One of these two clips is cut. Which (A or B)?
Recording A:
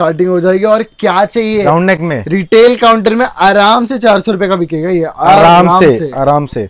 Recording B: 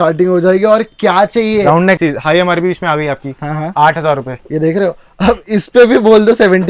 B